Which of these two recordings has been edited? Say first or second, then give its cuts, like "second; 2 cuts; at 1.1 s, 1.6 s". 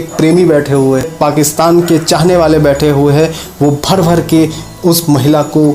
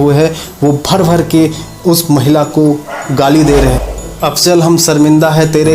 second; 1 cut; at 3.8 s